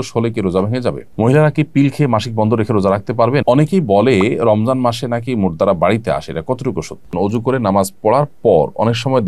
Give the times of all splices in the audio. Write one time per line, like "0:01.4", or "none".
0:01.1
0:03.4
0:07.1